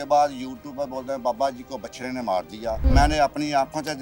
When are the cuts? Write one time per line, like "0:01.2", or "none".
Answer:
0:02.8